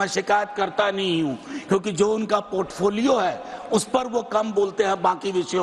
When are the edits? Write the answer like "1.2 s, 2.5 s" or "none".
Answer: none